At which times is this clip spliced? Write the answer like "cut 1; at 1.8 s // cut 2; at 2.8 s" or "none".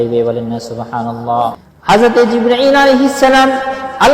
cut 1; at 1.7 s